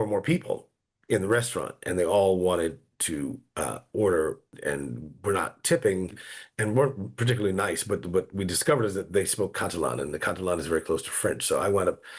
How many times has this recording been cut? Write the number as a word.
one